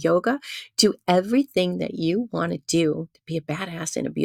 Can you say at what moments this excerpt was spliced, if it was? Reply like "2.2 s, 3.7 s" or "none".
none